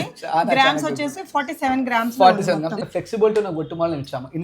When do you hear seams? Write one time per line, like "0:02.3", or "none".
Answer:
0:02.8